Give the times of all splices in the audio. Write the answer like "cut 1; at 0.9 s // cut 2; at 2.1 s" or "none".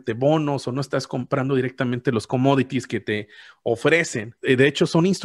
cut 1; at 4.3 s